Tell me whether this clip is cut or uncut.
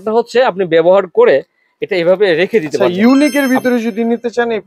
cut